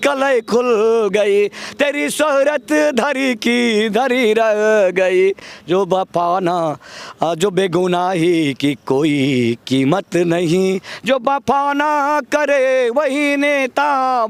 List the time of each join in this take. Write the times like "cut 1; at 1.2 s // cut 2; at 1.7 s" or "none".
none